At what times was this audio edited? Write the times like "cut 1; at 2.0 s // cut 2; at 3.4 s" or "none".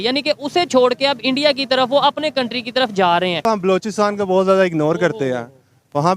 cut 1; at 3.4 s